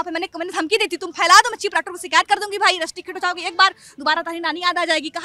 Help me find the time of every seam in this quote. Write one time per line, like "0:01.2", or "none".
none